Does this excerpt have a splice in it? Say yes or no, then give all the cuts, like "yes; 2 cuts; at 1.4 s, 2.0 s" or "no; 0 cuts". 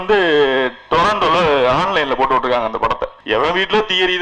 yes; 1 cut; at 3.1 s